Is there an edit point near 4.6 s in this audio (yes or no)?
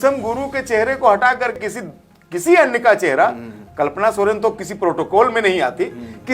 no